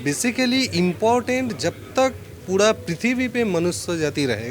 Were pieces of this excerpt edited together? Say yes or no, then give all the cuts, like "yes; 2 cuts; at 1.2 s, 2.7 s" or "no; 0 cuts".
no; 0 cuts